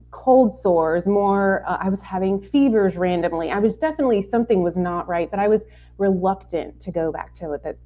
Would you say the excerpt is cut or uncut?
uncut